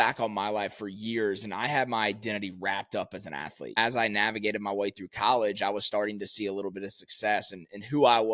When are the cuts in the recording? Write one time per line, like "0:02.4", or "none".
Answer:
0:03.8